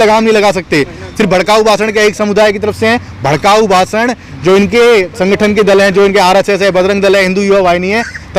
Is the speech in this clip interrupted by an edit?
no; 0 cuts

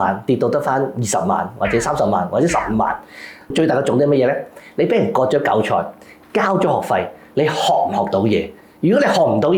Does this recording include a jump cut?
yes; 1 cut; at 3.4 s

